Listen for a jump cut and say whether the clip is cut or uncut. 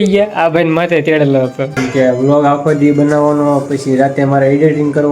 cut